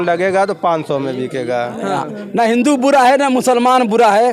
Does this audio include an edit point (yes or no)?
yes